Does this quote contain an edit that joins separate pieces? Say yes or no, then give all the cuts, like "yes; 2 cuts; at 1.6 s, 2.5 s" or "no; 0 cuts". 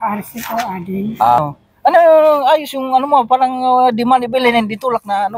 yes; 1 cut; at 1.4 s